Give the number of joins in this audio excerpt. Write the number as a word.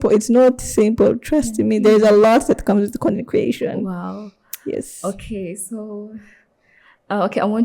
zero